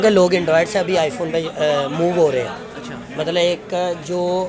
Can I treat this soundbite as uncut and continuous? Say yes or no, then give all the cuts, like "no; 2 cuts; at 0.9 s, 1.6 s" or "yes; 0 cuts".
yes; 0 cuts